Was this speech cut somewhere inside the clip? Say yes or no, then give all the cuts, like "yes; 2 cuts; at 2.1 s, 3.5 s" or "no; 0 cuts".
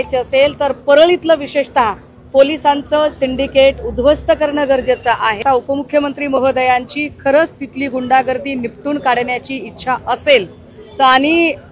yes; 1 cut; at 5.4 s